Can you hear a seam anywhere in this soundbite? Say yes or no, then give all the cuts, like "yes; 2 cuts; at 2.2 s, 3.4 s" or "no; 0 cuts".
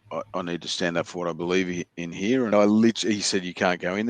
yes; 1 cut; at 2.5 s